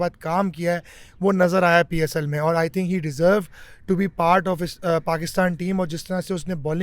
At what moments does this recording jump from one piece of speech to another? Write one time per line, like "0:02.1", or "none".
none